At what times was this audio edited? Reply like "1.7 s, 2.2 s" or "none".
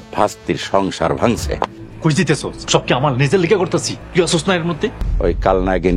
1.5 s, 2.5 s, 4.0 s, 5.1 s